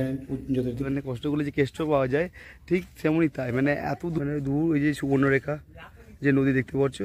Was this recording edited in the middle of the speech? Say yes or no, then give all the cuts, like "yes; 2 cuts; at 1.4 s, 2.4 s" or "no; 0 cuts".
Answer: yes; 2 cuts; at 0.8 s, 4.1 s